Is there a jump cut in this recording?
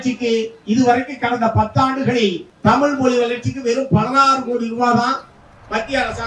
yes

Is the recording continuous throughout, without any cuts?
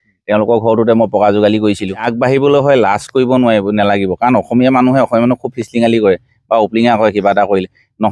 no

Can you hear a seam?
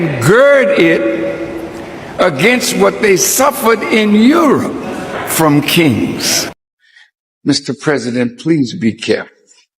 yes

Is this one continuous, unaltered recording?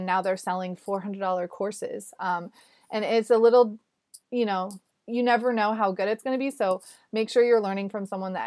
yes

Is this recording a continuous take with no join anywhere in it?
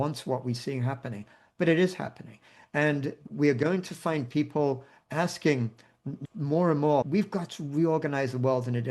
no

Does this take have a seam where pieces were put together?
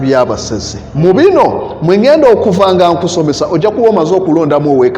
yes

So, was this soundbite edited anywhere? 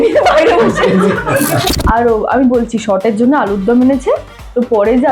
yes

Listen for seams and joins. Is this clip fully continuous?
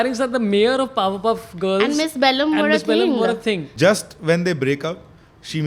no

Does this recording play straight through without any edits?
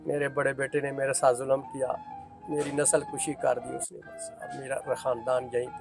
yes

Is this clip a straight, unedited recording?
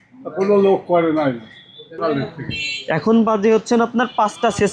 no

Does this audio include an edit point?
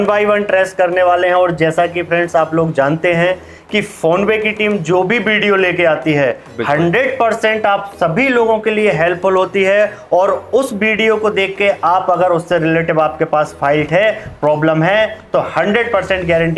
no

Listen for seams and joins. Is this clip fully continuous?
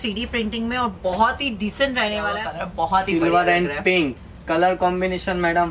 no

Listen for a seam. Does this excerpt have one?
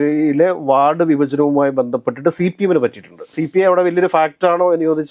yes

